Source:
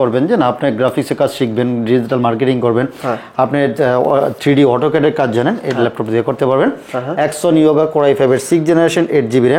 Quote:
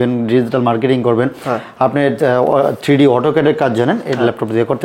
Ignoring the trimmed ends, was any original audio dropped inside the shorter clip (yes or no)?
no